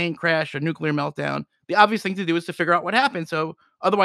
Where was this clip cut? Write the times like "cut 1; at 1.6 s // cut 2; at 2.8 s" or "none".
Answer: none